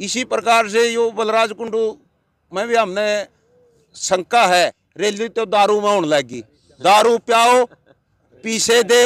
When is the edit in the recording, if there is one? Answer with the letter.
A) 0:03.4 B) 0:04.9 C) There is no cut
B